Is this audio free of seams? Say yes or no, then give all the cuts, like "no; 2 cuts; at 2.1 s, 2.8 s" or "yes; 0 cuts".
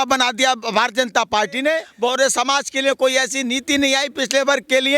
no; 1 cut; at 1.9 s